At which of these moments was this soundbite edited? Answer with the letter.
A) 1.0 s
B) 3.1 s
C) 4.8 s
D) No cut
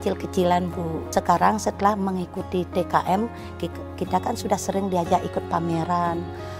A